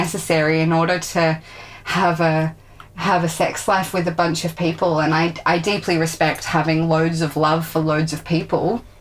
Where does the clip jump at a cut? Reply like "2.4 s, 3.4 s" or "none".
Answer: none